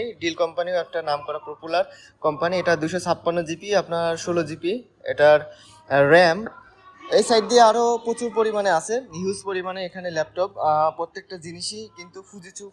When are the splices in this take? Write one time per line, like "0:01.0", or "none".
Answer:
0:06.5